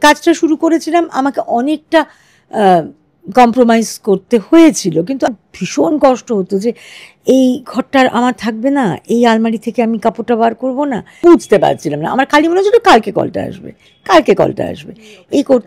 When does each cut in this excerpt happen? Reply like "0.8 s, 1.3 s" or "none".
5.3 s, 11.2 s